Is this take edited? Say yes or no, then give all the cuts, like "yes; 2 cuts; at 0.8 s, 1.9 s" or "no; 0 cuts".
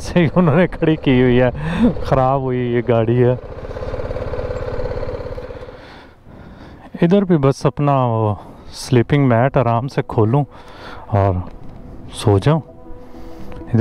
yes; 1 cut; at 5.6 s